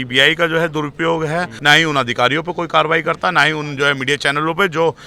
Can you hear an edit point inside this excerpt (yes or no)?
yes